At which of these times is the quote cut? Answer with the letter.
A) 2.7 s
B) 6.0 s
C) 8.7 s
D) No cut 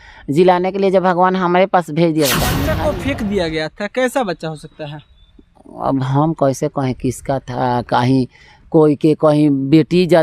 A